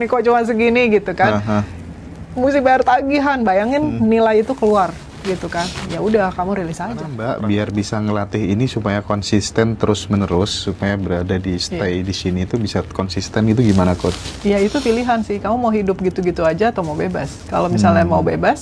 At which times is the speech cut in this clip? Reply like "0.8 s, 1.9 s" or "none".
7.1 s